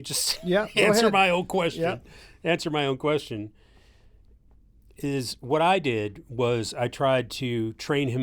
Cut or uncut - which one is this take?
uncut